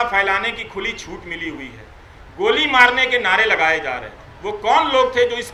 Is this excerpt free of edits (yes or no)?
yes